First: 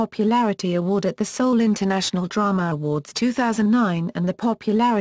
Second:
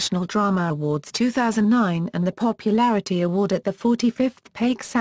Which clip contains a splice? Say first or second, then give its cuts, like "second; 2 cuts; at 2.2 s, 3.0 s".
first; 1 cut; at 1.0 s